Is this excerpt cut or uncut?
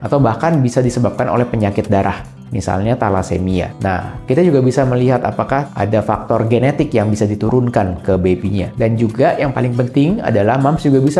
uncut